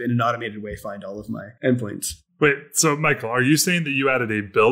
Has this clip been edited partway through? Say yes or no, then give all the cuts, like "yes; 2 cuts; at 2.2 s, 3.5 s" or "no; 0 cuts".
yes; 1 cut; at 1.5 s